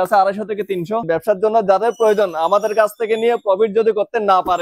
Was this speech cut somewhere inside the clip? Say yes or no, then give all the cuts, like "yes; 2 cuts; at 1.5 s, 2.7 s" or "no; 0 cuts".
yes; 1 cut; at 1.0 s